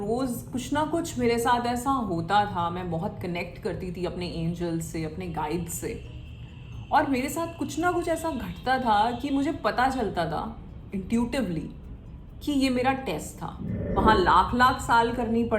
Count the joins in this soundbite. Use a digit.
1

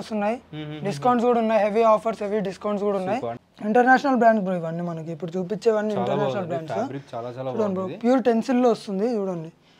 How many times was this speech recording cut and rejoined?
1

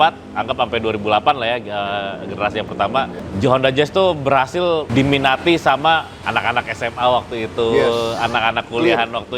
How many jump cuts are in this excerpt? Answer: 3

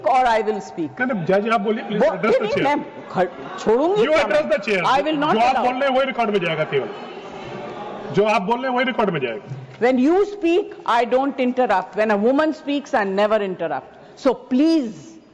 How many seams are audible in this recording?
0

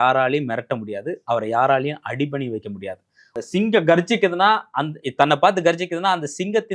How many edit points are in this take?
1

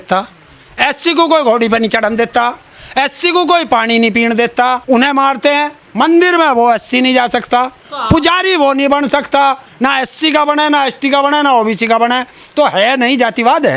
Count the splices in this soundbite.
2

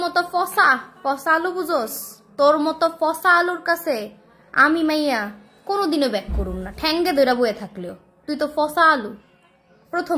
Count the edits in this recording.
0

